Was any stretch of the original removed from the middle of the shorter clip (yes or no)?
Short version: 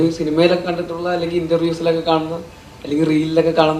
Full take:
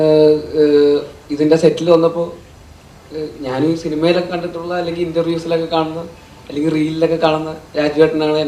no